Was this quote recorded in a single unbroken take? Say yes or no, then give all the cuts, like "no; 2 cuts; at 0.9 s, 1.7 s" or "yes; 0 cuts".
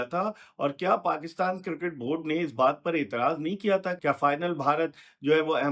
no; 1 cut; at 3.9 s